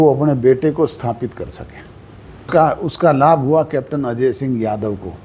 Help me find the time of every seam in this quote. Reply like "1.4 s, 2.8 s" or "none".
2.5 s